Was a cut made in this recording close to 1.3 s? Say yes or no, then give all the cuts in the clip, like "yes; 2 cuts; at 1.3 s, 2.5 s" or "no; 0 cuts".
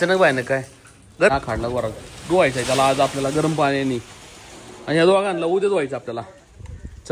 yes; 1 cut; at 1.3 s